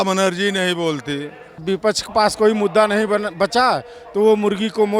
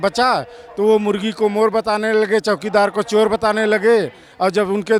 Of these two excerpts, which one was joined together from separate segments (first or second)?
first